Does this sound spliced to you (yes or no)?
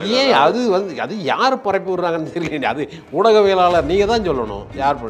no